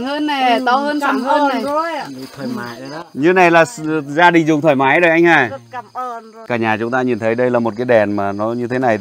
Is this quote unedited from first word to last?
no; 1 cut; at 6.4 s

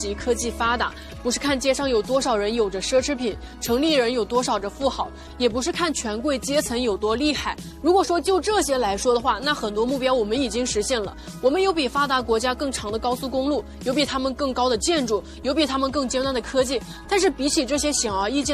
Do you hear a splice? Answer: yes; 1 cut; at 16.9 s

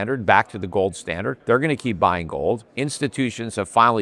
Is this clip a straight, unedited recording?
no; 1 cut; at 1.3 s

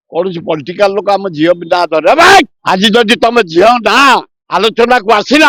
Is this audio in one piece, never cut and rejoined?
yes; 0 cuts

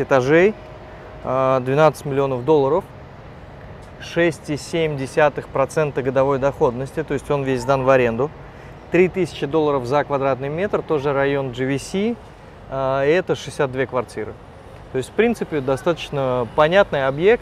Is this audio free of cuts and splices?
yes; 0 cuts

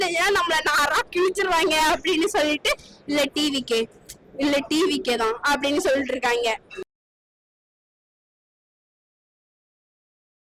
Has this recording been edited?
no; 0 cuts

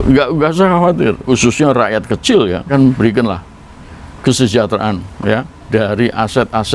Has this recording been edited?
yes; 2 cuts; at 1.2 s, 2.7 s

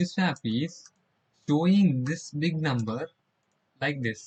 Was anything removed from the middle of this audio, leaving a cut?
no; 0 cuts

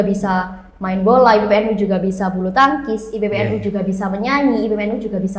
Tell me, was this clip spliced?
no; 0 cuts

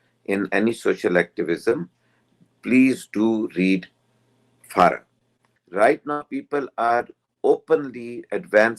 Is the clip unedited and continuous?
no; 1 cut; at 5.5 s

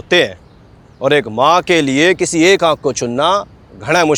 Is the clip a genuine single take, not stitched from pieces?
yes; 0 cuts

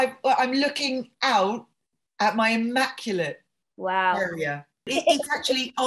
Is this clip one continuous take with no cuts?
no; 1 cut; at 4.9 s

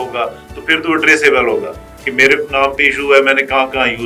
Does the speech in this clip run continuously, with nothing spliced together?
yes; 0 cuts

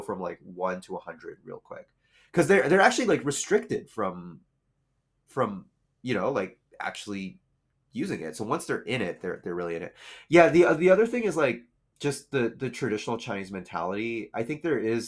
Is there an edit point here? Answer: no; 0 cuts

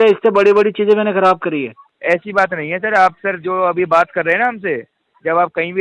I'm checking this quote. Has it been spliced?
yes; 1 cut; at 1.8 s

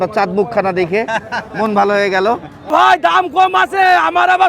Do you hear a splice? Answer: yes; 1 cut; at 2.7 s

